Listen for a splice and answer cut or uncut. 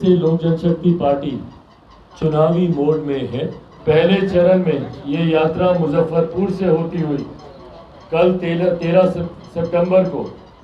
cut